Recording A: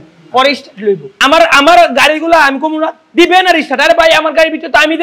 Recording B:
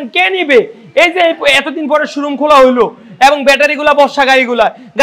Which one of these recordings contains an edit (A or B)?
A